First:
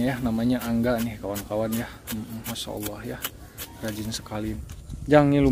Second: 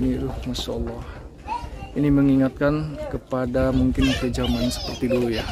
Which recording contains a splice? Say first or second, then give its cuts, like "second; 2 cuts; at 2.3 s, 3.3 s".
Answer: first; 1 cut; at 4.6 s